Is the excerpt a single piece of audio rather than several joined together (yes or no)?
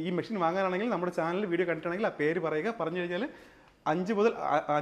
yes